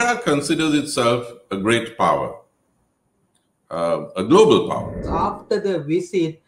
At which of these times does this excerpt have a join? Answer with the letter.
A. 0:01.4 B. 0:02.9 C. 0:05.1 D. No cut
C